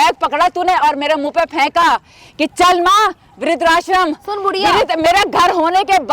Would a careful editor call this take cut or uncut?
uncut